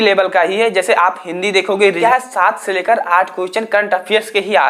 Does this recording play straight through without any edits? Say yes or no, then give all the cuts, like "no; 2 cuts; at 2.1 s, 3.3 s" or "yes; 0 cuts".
no; 1 cut; at 2.0 s